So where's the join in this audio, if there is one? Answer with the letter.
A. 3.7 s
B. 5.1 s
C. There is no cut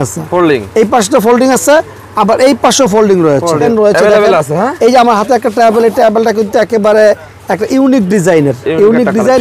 A